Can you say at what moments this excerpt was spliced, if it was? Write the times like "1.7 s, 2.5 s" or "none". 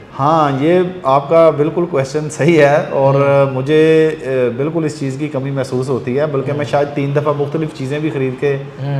none